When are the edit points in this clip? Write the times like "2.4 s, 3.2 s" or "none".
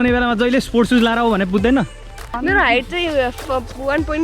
2.4 s